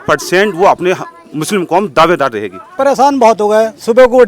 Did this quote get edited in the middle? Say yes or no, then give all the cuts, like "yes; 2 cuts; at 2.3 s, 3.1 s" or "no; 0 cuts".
yes; 1 cut; at 2.6 s